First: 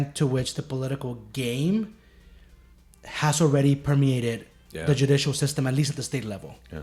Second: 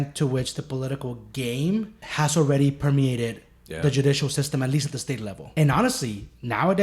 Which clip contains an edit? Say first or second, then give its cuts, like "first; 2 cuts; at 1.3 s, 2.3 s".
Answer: second; 2 cuts; at 2.0 s, 5.4 s